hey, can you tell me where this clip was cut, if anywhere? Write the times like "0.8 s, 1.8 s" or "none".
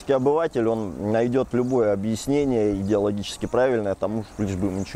none